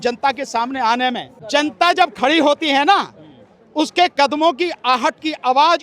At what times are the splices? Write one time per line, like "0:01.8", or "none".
0:01.3